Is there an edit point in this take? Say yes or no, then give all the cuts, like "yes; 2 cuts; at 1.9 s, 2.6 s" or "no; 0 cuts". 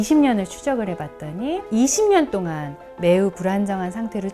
yes; 1 cut; at 1.6 s